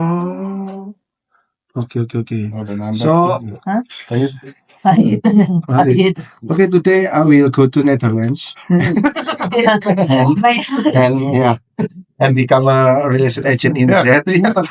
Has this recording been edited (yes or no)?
no